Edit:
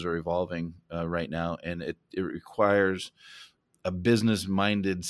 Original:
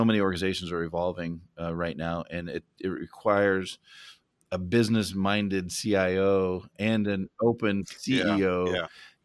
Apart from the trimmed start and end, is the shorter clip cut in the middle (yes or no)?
no